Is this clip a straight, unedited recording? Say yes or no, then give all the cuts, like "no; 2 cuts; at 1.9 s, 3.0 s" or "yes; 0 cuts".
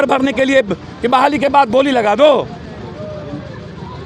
yes; 0 cuts